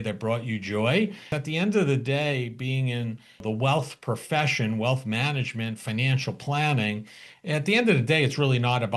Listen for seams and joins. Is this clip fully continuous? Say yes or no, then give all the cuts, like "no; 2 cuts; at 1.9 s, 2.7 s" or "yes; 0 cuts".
no; 2 cuts; at 1.3 s, 3.4 s